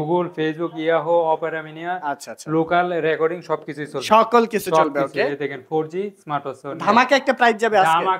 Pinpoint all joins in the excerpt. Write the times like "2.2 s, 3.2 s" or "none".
none